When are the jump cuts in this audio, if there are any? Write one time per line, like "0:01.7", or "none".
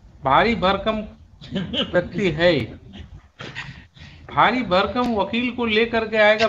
none